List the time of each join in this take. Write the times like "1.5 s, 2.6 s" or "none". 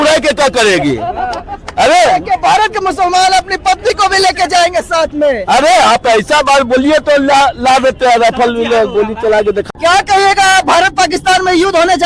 none